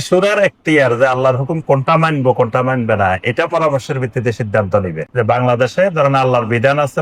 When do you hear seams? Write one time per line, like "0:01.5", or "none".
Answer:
none